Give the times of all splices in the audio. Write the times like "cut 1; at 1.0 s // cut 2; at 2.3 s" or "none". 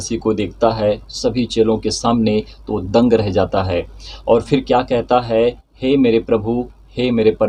none